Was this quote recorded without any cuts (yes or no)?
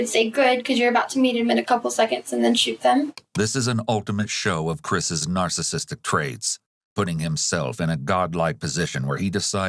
yes